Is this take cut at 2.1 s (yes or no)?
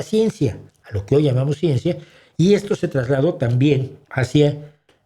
no